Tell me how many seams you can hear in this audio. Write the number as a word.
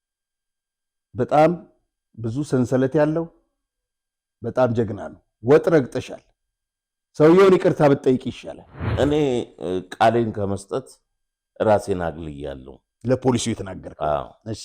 one